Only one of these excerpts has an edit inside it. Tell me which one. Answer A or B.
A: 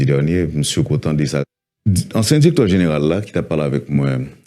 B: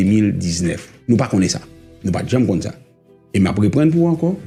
A